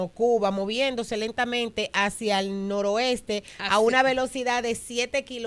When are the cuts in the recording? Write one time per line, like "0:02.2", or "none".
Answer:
none